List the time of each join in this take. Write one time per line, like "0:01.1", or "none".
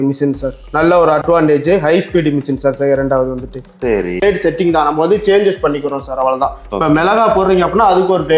0:04.2